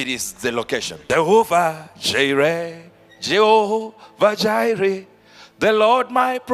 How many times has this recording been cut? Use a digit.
1